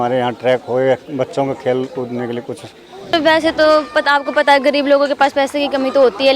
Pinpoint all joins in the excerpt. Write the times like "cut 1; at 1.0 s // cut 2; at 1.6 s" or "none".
cut 1; at 3.1 s